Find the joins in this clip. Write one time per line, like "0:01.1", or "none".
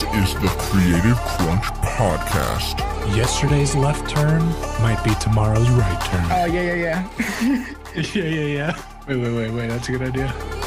none

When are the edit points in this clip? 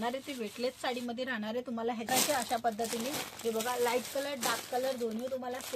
0:02.1

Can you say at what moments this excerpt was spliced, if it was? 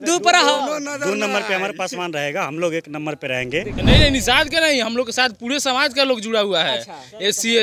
0:03.8

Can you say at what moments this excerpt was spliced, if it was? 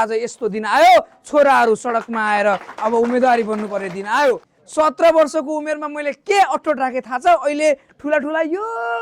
0:04.5

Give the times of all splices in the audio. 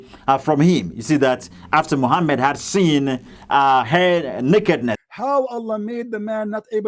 0:05.0

